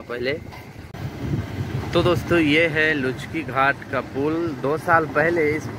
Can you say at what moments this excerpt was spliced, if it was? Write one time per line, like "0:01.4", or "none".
0:00.9